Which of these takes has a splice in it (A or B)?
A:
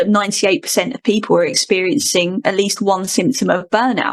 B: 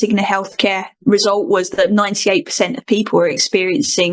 B